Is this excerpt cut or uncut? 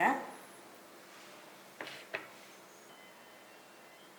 cut